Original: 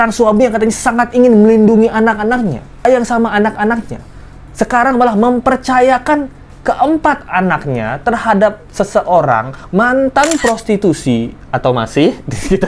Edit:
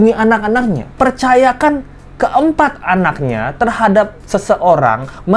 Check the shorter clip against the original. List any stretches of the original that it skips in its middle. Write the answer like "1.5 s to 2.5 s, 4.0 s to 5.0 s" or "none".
2.7 s to 5.4 s